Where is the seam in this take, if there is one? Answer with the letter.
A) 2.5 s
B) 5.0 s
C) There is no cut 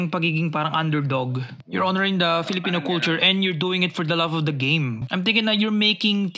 B